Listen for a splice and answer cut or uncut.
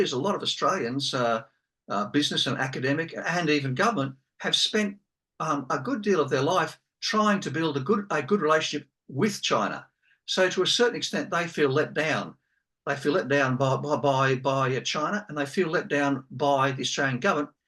uncut